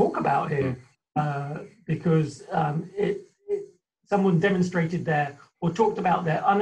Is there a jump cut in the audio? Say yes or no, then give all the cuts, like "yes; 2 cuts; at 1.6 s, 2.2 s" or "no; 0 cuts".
no; 0 cuts